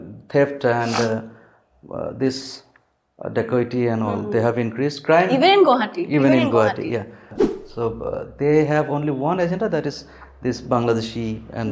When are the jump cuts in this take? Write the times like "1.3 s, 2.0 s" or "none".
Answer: 7.4 s